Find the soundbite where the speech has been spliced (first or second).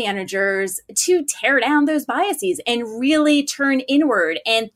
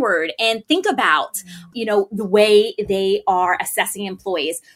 second